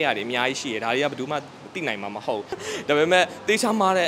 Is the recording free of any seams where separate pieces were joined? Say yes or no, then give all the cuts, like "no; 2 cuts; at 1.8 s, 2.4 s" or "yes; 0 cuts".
no; 1 cut; at 2.6 s